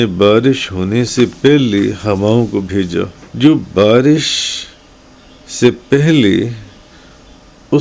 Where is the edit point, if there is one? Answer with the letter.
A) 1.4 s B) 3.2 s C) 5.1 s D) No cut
B